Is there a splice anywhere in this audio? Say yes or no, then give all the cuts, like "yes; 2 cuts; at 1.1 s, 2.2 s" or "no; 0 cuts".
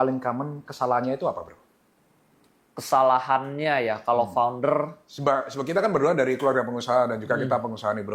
no; 0 cuts